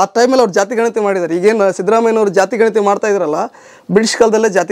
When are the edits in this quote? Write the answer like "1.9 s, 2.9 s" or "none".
none